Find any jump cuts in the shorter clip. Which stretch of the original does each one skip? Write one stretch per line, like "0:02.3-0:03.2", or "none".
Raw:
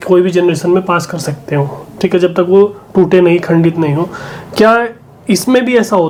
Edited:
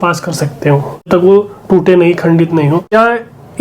0:01.9-0:02.3
0:04.2-0:04.6